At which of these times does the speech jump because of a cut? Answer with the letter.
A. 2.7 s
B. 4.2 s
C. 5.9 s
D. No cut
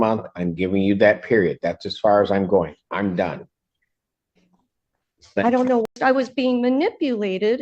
C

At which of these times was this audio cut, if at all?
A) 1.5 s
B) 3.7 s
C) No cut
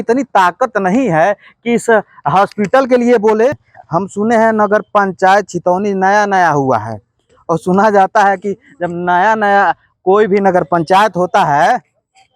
B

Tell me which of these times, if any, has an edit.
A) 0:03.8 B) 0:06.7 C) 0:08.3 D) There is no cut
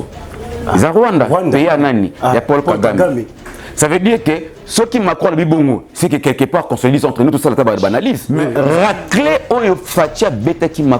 C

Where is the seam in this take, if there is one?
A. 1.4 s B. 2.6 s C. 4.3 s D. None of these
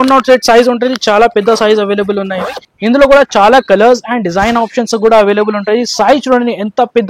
B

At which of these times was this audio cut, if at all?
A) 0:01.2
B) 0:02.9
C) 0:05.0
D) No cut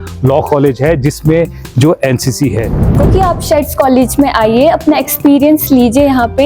B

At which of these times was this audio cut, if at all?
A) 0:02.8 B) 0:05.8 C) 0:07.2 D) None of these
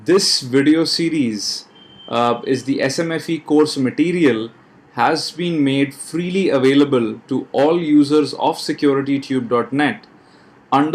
A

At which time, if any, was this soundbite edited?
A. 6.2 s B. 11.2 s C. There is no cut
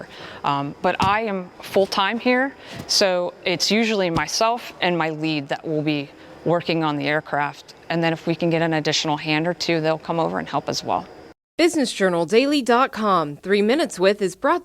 B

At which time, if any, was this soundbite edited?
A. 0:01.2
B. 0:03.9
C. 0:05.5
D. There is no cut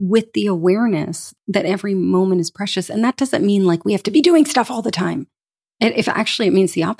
A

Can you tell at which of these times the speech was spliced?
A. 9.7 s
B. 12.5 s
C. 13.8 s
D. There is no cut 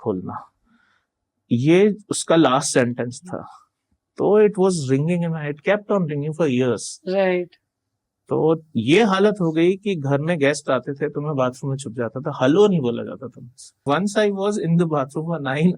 C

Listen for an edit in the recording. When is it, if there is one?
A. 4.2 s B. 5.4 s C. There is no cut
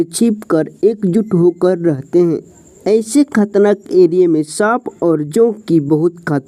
C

